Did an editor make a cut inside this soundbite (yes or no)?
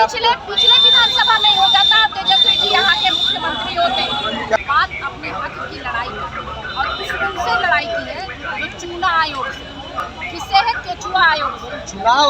yes